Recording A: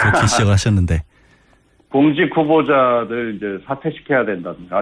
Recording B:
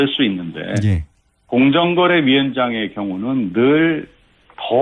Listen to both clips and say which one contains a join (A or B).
A